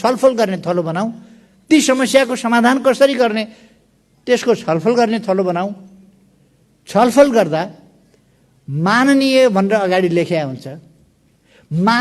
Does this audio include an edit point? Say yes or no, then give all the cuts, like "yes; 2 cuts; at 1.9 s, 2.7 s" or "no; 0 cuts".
no; 0 cuts